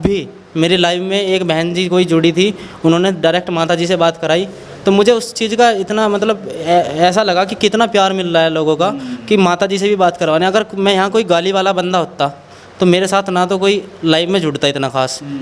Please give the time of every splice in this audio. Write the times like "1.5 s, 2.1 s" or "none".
none